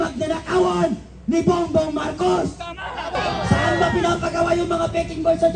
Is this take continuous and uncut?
no; 1 cut; at 3.2 s

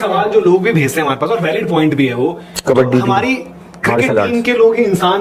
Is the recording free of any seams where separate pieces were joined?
yes; 0 cuts

